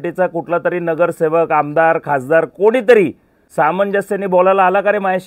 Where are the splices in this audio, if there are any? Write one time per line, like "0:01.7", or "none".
0:03.4